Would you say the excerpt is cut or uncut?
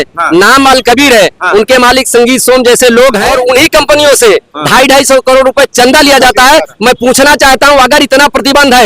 cut